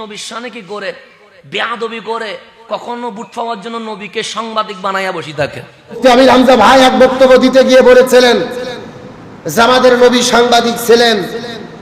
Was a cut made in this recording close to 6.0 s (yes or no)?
yes